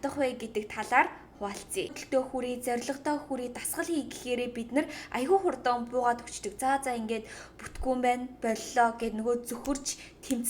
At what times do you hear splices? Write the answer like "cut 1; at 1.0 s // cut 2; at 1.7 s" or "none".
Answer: cut 1; at 1.9 s